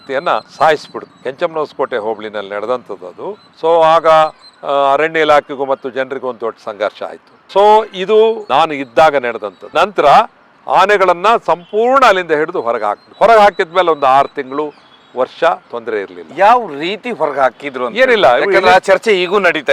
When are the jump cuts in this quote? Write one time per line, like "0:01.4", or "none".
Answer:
none